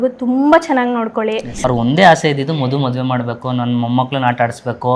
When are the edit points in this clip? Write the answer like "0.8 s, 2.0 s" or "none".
1.5 s